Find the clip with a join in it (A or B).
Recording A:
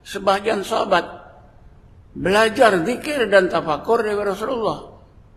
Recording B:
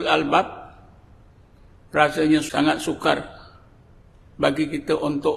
B